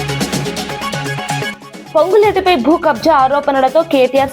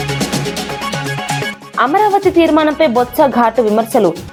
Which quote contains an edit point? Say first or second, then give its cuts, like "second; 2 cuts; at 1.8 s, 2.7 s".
first; 1 cut; at 1.6 s